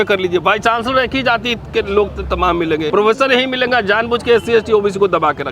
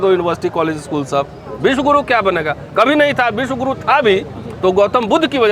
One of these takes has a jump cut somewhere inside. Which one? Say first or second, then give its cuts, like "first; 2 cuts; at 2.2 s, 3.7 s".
first; 1 cut; at 2.9 s